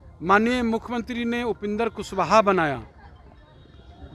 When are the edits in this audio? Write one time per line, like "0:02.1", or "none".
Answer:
none

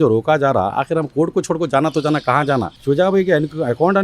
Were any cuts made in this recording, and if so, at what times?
0:02.7

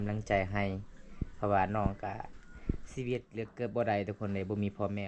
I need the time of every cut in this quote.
none

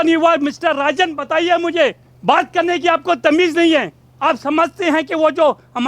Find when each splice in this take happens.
0:02.1
0:04.0

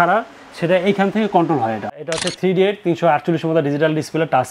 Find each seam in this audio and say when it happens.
0:02.1

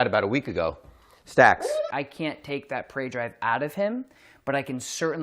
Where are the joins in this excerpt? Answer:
0:01.9

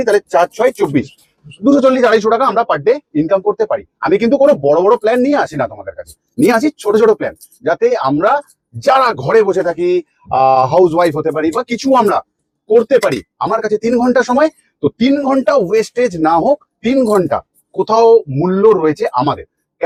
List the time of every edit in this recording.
none

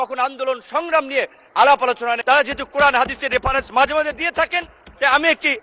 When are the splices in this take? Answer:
0:02.2

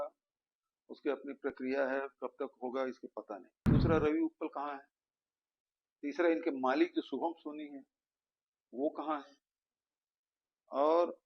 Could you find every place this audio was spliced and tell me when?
0:03.6

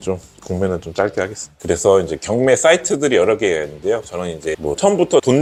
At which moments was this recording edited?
none

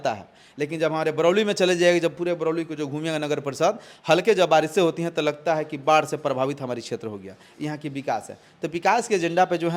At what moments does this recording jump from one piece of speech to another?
none

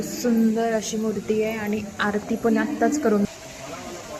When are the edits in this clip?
0:03.3

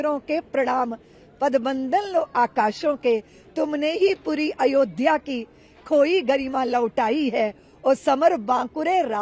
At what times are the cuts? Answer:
none

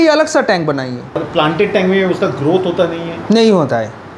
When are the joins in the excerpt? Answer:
0:01.3

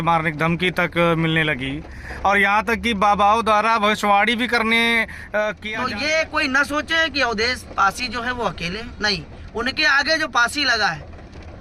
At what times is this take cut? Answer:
0:05.6

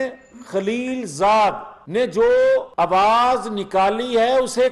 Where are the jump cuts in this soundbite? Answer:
0:01.7
0:02.7

